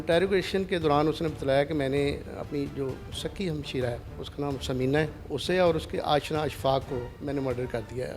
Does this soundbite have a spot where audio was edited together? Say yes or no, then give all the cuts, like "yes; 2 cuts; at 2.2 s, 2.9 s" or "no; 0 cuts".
yes; 3 cuts; at 4.1 s, 5.2 s, 7.1 s